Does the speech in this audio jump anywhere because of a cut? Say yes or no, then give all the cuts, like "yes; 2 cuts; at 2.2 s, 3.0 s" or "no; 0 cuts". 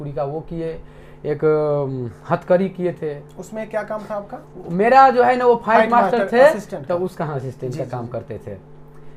no; 0 cuts